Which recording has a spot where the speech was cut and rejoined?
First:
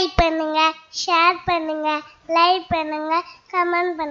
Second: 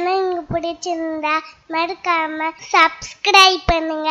second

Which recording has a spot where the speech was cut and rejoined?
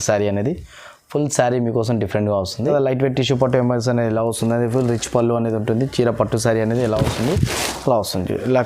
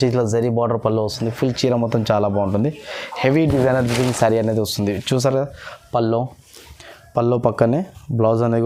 first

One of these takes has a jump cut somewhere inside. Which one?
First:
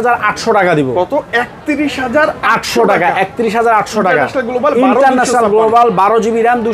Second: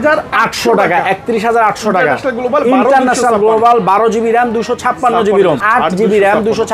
second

